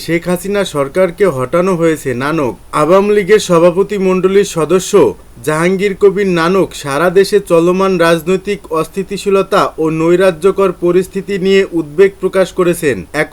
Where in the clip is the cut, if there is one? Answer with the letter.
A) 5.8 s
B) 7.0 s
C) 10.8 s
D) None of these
D